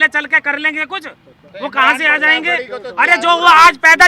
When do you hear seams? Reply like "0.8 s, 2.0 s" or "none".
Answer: none